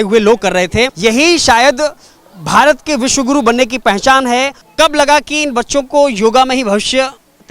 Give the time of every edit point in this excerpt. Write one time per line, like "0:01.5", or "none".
0:00.9
0:04.6